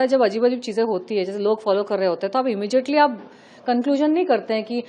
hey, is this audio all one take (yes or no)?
yes